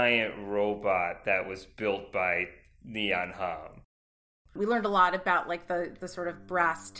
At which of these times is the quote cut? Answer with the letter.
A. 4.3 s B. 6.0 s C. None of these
A